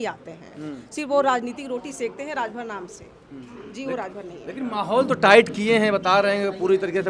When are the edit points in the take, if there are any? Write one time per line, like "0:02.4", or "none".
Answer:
none